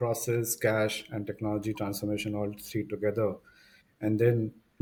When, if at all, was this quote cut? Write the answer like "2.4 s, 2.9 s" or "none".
none